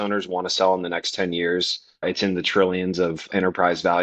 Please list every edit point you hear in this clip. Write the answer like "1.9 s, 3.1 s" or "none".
2.0 s, 3.3 s